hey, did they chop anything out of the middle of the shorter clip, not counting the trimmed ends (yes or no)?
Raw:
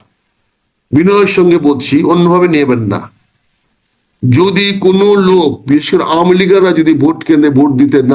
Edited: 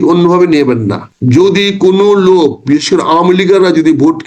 yes